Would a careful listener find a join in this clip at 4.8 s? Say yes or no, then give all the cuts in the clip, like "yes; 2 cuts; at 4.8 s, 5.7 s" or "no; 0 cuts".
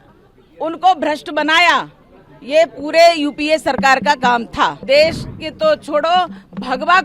yes; 1 cut; at 4.8 s